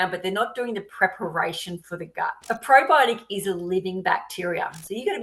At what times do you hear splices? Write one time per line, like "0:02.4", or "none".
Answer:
0:02.4